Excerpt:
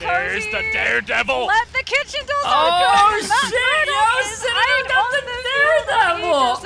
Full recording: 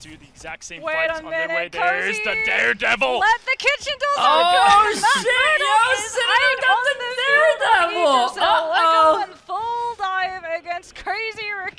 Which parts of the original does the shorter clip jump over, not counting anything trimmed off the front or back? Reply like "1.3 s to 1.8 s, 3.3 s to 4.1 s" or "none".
none